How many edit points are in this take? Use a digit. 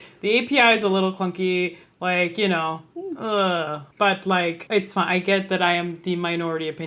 2